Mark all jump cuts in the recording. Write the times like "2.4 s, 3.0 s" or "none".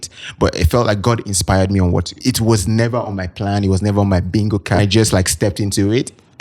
2.1 s, 4.8 s